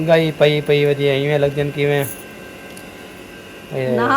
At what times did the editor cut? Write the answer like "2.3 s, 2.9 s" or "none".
none